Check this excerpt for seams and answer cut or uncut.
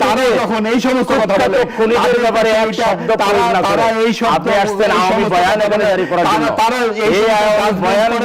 uncut